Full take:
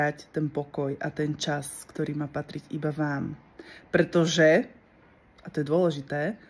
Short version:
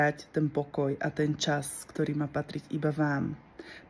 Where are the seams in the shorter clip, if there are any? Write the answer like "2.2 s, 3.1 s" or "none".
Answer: none